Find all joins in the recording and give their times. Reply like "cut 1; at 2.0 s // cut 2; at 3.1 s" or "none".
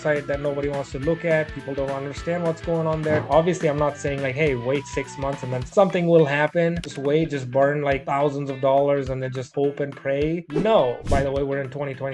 cut 1; at 3.2 s // cut 2; at 11.0 s